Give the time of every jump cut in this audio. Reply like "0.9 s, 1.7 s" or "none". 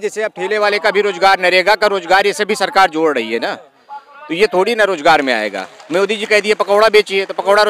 none